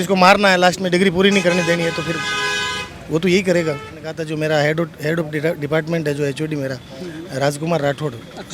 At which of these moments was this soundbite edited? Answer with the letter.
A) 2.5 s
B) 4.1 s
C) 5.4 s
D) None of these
B